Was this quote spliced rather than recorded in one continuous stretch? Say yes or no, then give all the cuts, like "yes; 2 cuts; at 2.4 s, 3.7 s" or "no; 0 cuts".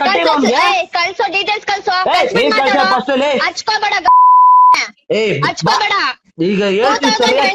no; 0 cuts